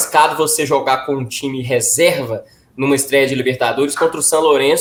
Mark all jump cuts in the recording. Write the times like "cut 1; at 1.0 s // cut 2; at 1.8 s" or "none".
none

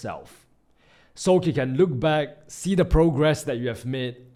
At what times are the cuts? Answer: none

